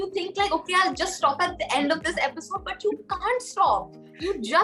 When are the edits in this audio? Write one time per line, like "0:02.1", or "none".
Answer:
none